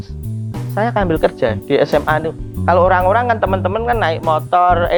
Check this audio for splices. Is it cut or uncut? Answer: uncut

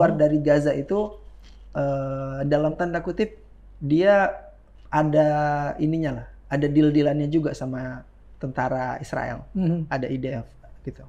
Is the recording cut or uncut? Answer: uncut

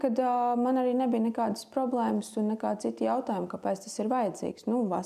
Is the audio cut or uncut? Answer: uncut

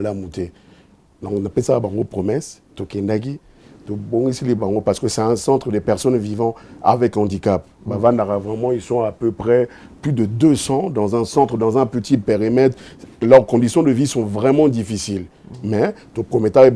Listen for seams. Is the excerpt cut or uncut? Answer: uncut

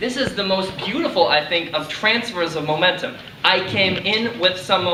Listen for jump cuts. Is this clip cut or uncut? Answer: uncut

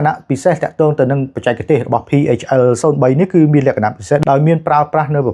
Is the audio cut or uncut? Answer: cut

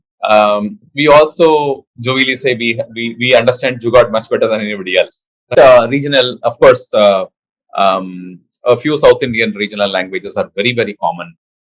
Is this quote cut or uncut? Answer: cut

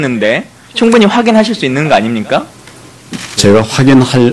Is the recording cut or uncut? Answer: cut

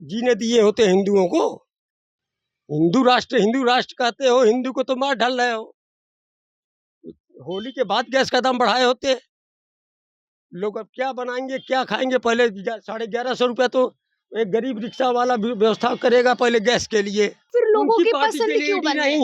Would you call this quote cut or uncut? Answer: cut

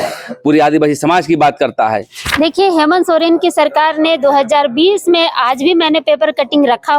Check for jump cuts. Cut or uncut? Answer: cut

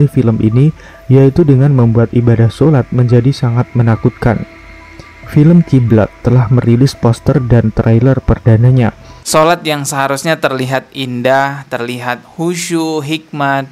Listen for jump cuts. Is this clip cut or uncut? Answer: cut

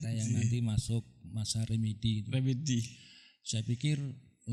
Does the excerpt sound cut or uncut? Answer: uncut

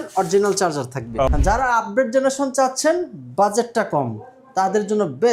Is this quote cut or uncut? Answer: cut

